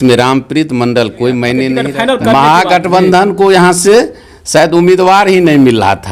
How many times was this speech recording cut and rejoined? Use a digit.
1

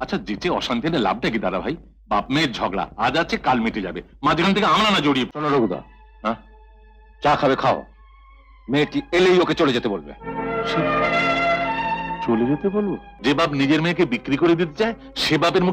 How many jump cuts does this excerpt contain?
2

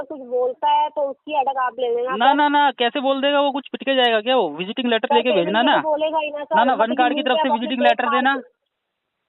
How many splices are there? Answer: 0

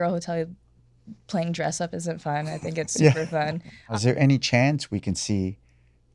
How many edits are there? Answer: 1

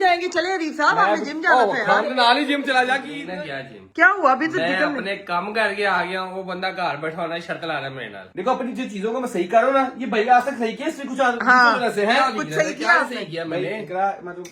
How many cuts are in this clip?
2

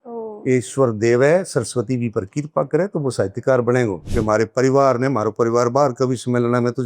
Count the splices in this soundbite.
1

